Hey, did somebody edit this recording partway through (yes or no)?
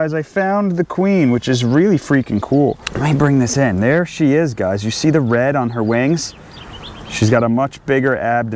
yes